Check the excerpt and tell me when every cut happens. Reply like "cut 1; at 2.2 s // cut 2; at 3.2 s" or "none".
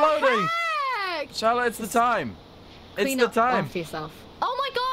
cut 1; at 1.2 s